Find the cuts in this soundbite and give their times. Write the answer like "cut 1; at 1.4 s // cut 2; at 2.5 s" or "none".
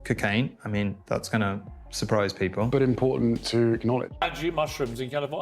cut 1; at 4.2 s